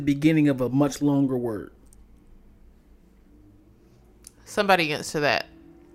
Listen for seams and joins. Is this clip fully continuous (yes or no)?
yes